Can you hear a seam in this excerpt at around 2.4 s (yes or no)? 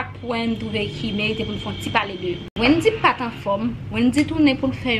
yes